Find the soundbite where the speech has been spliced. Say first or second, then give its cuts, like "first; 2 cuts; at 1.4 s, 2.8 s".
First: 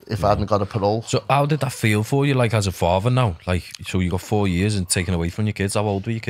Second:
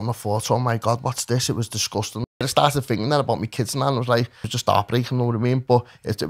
second; 2 cuts; at 2.5 s, 4.4 s